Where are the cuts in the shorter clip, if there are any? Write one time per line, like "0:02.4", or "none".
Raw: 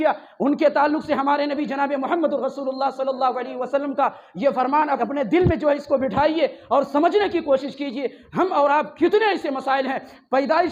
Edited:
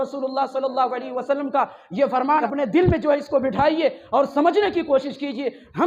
0:02.4